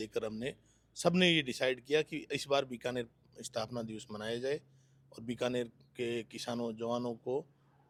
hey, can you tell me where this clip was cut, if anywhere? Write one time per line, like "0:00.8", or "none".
none